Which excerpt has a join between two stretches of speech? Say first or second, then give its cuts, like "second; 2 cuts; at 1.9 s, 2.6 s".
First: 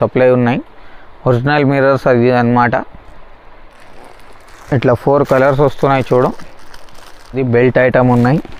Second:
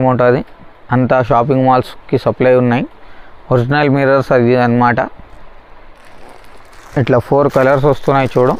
first; 1 cut; at 7.4 s